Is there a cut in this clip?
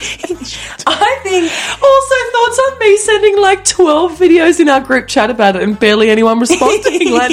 no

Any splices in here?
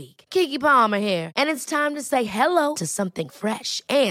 no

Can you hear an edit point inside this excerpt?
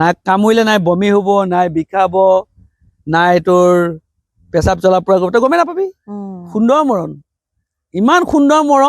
no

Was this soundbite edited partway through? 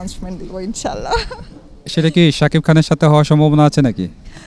no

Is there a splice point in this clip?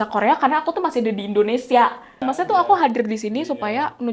yes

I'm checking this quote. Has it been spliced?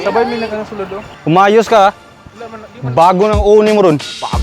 yes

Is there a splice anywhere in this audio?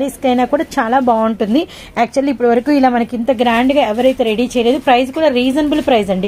no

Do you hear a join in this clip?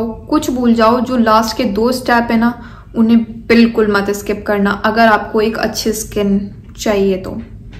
no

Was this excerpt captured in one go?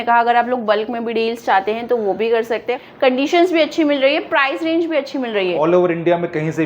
no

